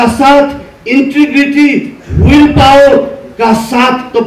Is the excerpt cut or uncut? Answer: uncut